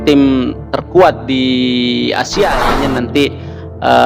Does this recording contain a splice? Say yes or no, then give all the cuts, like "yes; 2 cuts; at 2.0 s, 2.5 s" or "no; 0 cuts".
yes; 1 cut; at 2.7 s